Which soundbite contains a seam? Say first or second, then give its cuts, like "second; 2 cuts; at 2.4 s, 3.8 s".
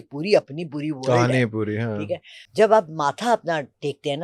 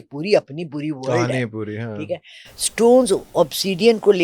first; 1 cut; at 2.3 s